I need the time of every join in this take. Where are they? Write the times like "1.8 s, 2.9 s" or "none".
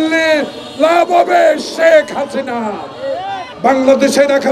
3.5 s